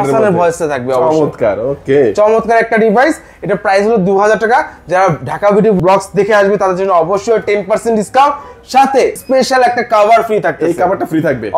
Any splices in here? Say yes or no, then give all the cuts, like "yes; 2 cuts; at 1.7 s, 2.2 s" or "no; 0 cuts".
no; 0 cuts